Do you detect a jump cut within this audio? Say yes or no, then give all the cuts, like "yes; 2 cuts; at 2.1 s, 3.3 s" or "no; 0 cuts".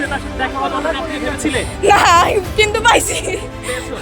no; 0 cuts